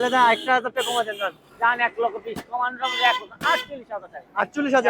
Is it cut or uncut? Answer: uncut